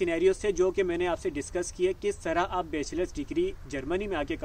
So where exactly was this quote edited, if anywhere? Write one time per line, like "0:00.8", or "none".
none